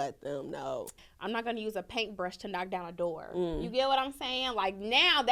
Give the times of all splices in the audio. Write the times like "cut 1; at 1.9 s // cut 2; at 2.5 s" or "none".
cut 1; at 1.0 s